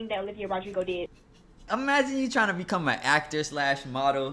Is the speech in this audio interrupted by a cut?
yes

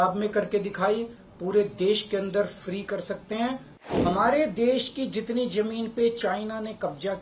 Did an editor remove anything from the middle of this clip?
yes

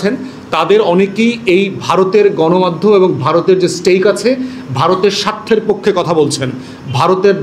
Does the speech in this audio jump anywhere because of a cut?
no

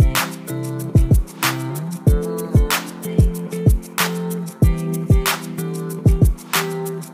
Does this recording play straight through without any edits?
yes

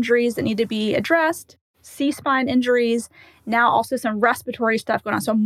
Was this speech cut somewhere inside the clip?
no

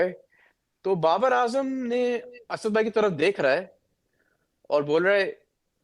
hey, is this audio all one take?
yes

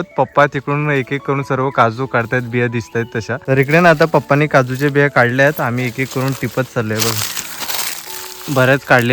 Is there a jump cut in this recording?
yes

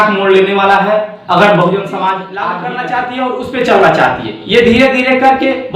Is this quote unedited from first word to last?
no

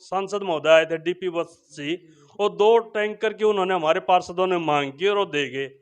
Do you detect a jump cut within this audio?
no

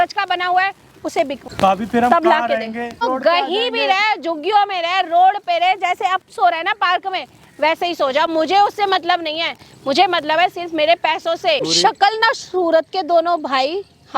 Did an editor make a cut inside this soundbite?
yes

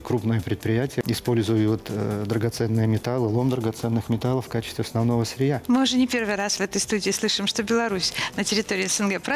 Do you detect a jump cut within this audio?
yes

